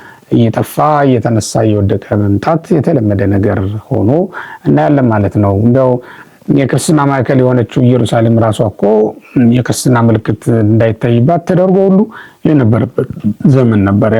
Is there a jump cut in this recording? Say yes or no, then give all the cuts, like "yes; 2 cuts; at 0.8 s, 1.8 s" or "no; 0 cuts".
no; 0 cuts